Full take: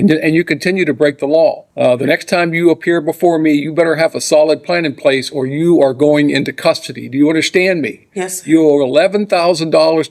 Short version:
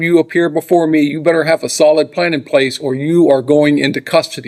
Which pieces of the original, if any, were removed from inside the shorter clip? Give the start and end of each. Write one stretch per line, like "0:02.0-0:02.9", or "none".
none